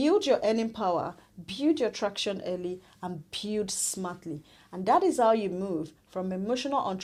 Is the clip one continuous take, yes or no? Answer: yes